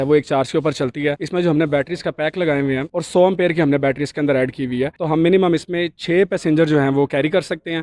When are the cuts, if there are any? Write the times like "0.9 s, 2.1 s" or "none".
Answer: 4.9 s